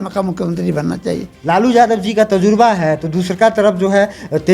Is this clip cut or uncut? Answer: cut